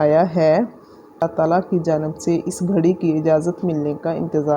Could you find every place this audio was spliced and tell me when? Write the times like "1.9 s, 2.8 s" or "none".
1.2 s